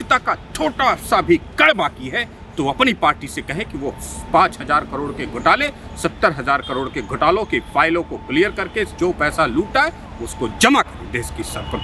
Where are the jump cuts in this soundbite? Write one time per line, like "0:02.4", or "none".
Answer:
none